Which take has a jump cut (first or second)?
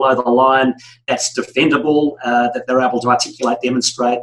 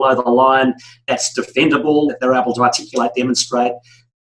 second